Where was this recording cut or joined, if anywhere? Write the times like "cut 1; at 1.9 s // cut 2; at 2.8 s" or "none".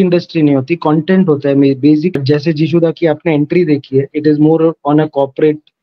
cut 1; at 2.2 s